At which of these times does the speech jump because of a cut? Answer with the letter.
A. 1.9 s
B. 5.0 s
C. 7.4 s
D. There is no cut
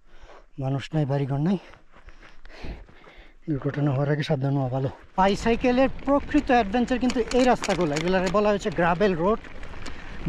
B